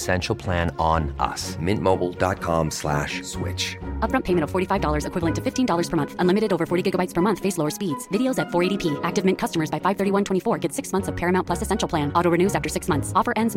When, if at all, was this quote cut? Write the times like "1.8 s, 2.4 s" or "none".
none